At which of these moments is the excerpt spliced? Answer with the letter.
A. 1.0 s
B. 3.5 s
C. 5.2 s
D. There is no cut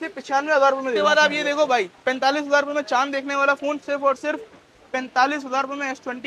A